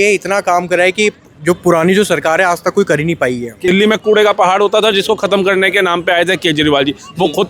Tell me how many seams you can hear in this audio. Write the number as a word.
one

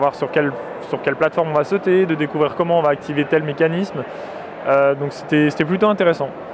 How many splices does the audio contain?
one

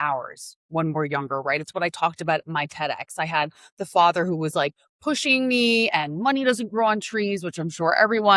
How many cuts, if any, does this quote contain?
zero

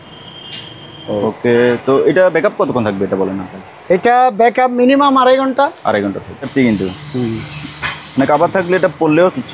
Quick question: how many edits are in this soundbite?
two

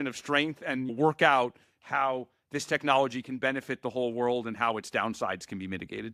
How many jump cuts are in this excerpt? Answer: one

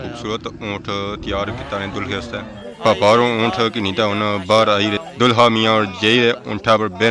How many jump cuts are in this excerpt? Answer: two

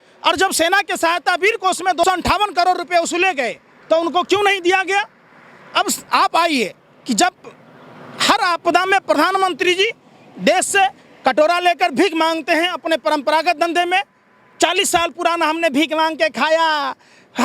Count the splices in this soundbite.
one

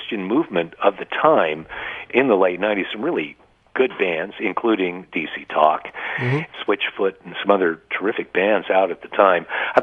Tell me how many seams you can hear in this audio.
two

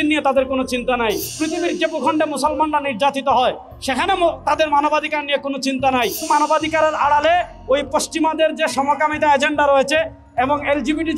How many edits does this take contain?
two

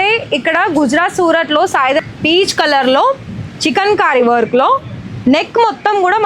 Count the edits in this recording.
one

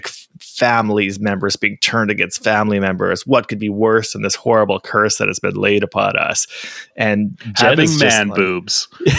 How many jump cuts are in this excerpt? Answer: zero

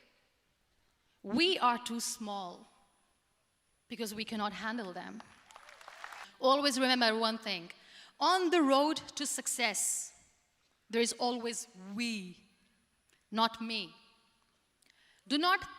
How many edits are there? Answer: one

